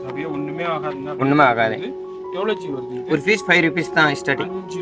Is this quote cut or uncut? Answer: uncut